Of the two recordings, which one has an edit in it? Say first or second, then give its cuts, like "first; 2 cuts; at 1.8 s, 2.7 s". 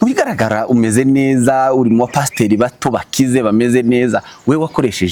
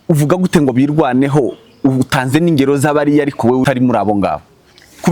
second; 1 cut; at 3.6 s